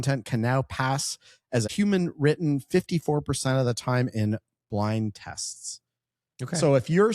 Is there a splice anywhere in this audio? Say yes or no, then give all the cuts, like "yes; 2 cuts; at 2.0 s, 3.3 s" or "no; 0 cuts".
yes; 1 cut; at 1.7 s